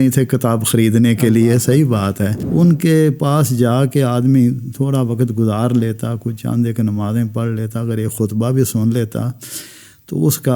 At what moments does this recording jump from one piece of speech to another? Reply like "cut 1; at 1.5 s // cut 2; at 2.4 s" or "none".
cut 1; at 2.4 s